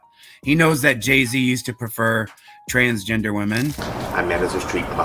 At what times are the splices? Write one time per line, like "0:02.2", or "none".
0:03.8